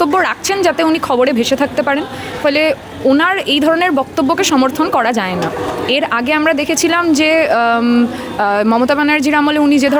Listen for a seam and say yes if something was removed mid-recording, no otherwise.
no